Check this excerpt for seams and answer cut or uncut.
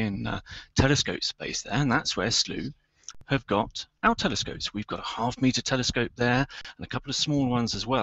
uncut